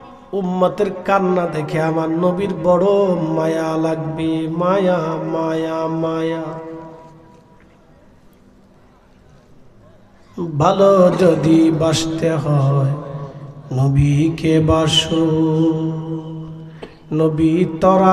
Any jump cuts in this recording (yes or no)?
no